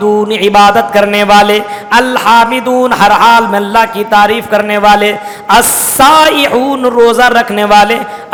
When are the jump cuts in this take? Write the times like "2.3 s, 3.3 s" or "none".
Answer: none